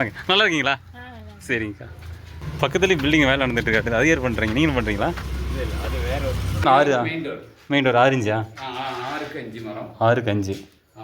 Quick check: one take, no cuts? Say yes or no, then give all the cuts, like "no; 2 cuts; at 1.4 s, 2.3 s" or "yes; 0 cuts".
no; 2 cuts; at 2.4 s, 6.7 s